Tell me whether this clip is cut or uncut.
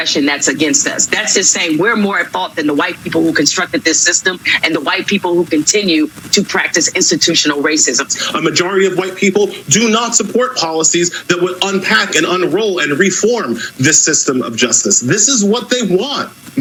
uncut